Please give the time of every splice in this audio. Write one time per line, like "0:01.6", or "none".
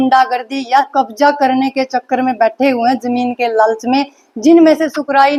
none